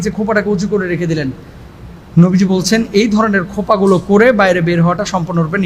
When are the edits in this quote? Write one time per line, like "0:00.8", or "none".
none